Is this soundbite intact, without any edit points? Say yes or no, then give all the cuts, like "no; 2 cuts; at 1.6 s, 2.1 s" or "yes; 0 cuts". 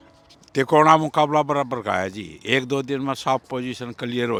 yes; 0 cuts